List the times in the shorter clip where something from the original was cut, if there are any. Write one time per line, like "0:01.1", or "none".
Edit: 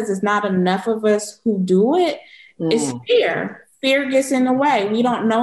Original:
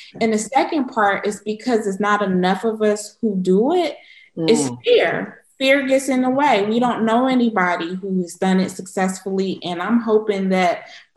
none

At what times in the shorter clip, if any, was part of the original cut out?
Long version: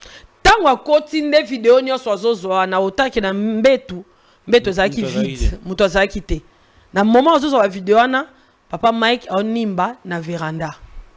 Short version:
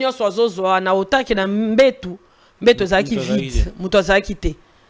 none

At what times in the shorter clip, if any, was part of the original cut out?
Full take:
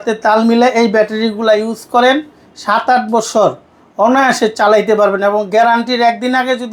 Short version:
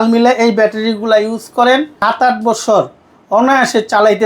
0:01.9

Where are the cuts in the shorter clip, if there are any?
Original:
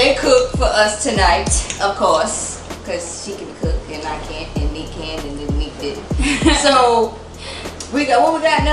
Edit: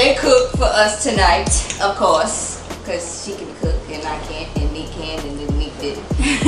none

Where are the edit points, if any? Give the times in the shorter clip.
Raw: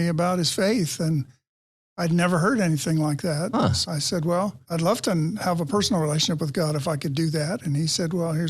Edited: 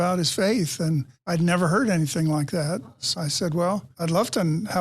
0:01.1

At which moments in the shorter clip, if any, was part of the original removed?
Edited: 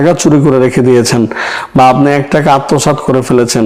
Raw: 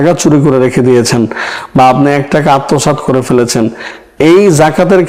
none

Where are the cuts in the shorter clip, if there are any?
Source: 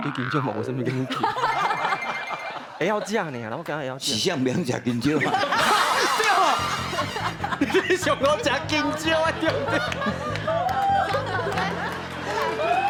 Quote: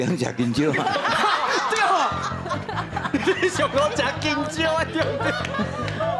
none

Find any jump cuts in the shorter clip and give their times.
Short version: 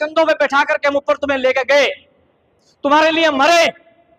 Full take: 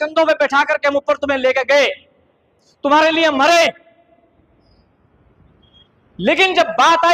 none

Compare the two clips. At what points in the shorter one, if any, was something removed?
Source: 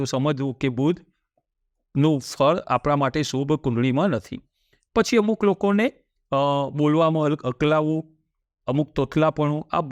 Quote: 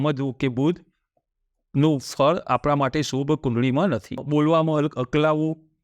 0:04.2

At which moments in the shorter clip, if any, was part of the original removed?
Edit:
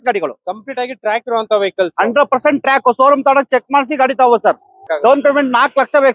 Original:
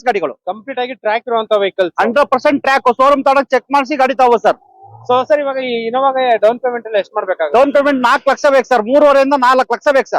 0:04.9

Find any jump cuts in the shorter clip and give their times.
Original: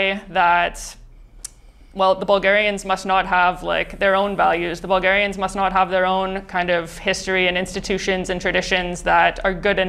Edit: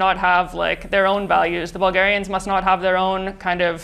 none

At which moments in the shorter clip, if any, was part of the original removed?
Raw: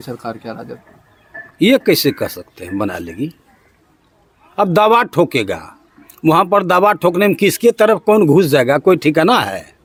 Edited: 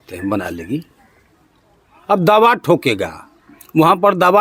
none

